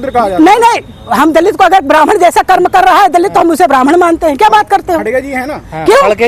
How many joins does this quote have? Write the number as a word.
zero